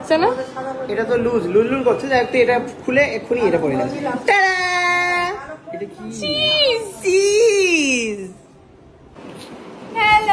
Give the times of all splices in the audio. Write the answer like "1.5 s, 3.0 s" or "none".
9.1 s